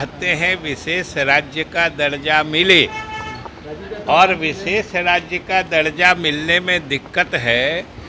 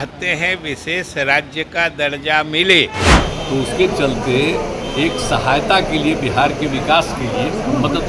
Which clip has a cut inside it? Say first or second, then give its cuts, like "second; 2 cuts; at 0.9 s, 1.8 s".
second; 1 cut; at 3.1 s